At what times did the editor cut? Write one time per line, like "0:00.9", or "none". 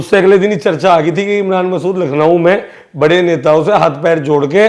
none